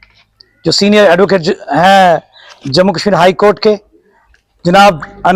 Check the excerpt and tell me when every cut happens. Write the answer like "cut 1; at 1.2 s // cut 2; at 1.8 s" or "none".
none